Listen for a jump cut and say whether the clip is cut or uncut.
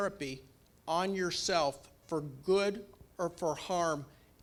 uncut